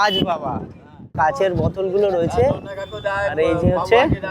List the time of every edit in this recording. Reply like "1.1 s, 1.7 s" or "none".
1.1 s